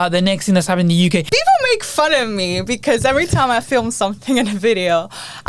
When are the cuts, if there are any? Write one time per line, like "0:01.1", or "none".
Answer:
0:01.3